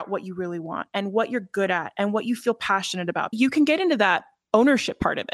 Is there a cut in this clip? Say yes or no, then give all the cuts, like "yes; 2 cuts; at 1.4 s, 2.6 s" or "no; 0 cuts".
yes; 2 cuts; at 3.3 s, 4.3 s